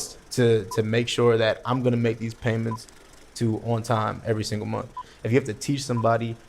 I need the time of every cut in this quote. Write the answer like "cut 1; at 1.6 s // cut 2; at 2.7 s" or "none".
cut 1; at 5.0 s